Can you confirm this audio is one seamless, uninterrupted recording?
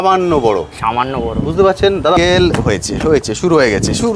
no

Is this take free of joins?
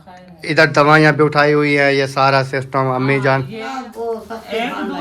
no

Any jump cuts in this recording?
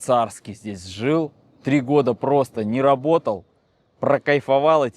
no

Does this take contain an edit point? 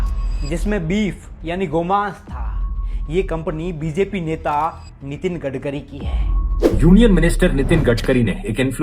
yes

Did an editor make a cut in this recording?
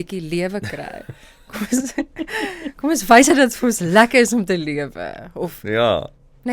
no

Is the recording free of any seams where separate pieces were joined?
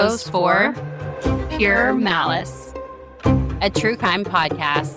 yes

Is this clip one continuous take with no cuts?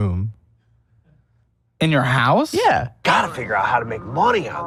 yes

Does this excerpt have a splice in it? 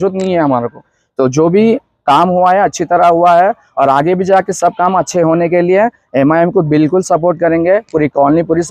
no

